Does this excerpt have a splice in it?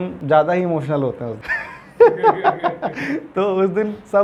no; 0 cuts

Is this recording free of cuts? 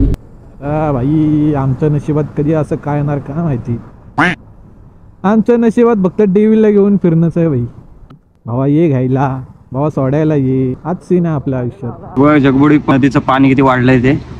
no; 3 cuts; at 8.1 s, 12.2 s, 12.9 s

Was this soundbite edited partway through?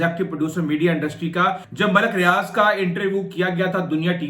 yes; 1 cut; at 1.7 s

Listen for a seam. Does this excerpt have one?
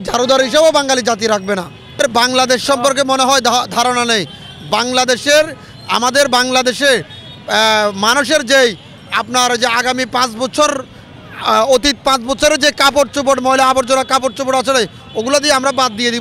no; 0 cuts

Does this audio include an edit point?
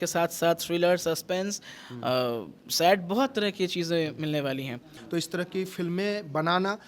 yes; 1 cut; at 4.9 s

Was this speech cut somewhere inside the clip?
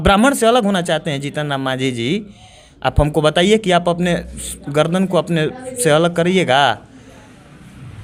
no; 0 cuts

